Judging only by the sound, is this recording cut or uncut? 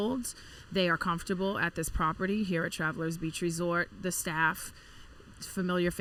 uncut